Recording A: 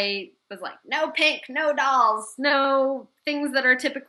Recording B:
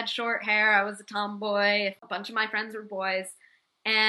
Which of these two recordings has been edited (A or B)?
B